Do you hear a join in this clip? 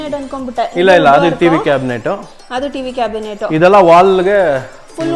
no; 0 cuts

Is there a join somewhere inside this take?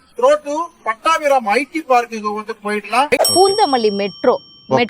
yes; 1 cut; at 3.3 s

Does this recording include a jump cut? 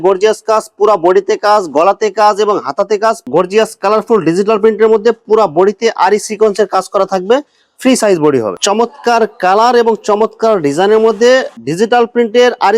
yes; 2 cuts; at 3.2 s, 8.5 s

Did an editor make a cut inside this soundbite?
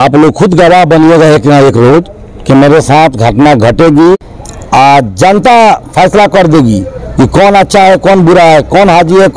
yes; 1 cut; at 4.2 s

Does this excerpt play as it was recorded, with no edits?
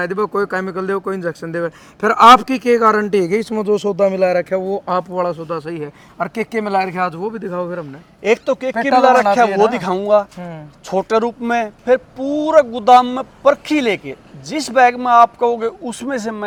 yes; 0 cuts

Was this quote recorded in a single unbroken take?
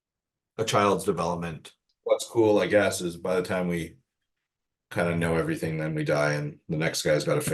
no; 1 cut; at 1.9 s

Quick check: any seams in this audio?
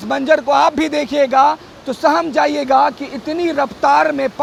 no; 0 cuts

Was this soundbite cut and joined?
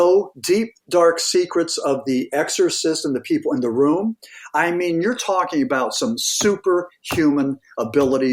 no; 0 cuts

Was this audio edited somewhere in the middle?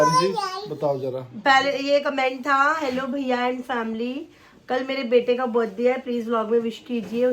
no; 0 cuts

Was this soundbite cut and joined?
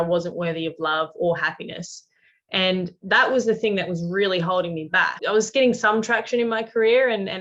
yes; 1 cut; at 5.2 s

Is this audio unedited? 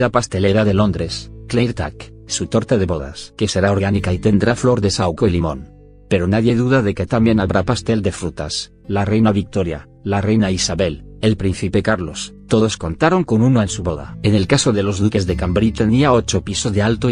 yes; 0 cuts

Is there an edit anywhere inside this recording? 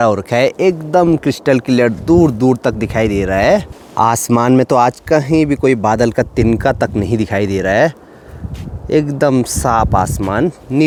no; 0 cuts

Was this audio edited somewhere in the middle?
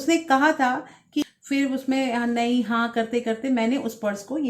yes; 1 cut; at 1.2 s

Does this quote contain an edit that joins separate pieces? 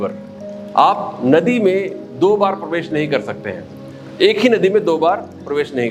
no; 0 cuts

